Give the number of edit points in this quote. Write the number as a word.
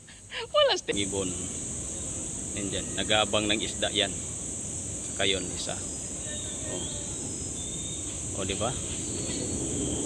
one